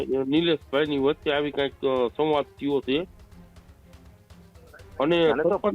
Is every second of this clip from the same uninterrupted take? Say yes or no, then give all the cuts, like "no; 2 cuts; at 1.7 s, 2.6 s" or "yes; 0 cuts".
yes; 0 cuts